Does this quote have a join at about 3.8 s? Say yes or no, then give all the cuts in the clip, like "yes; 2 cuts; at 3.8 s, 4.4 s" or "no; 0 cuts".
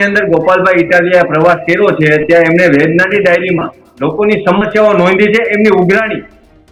no; 0 cuts